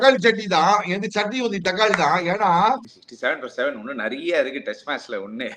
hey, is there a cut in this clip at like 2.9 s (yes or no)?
yes